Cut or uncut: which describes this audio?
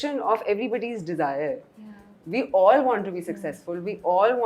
uncut